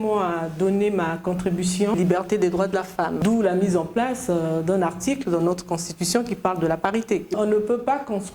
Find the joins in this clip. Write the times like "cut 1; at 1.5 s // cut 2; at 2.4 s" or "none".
cut 1; at 2.0 s // cut 2; at 3.2 s // cut 3; at 7.3 s